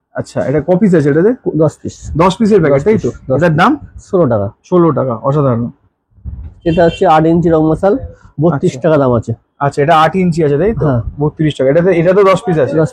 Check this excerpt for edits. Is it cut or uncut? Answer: uncut